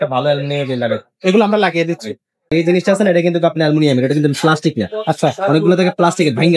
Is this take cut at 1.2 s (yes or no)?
no